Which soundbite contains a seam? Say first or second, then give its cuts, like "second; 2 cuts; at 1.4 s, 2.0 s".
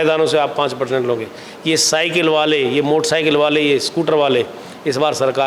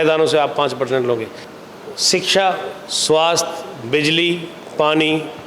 second; 1 cut; at 1.4 s